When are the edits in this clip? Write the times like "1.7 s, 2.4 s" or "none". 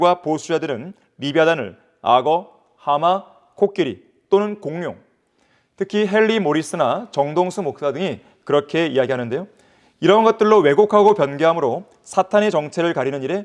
none